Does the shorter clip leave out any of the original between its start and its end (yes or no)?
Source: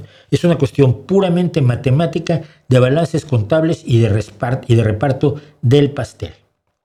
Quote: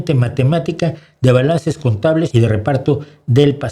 yes